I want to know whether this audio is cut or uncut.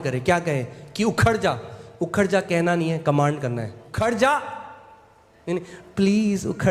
cut